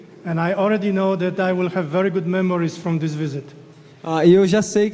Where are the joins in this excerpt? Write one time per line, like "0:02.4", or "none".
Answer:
none